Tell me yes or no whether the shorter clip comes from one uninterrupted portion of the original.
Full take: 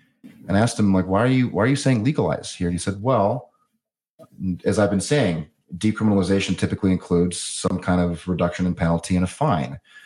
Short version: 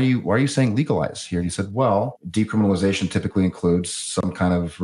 no